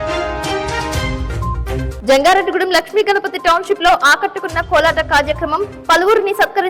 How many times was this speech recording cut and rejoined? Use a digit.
1